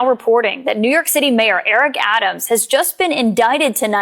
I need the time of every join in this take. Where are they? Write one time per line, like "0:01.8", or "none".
none